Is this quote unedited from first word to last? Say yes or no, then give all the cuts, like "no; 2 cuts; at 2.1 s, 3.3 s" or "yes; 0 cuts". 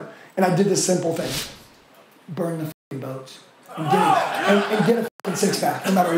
no; 1 cut; at 1.3 s